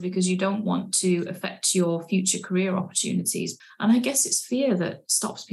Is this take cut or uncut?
cut